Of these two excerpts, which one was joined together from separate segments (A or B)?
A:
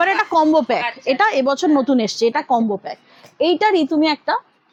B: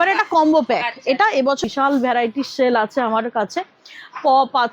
B